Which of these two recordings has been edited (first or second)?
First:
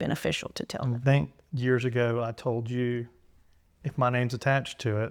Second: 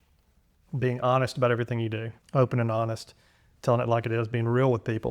second